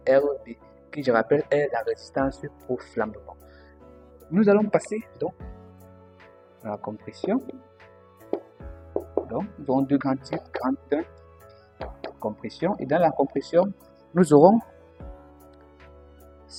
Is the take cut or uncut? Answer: uncut